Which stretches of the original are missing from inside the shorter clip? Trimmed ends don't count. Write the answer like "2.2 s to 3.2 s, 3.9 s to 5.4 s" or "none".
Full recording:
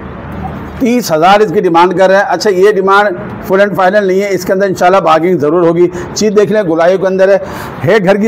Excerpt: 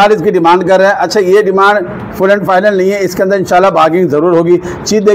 none